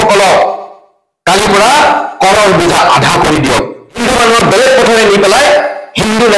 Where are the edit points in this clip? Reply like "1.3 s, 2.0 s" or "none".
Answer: 4.0 s